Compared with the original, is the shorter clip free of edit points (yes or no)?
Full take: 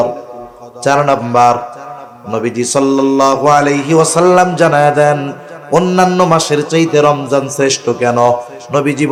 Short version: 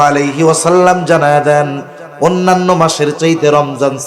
yes